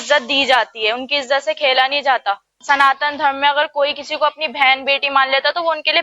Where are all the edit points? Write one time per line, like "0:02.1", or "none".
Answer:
0:02.6